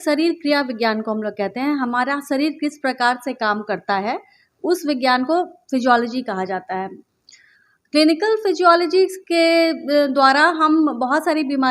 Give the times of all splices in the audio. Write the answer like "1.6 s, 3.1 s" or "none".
7.0 s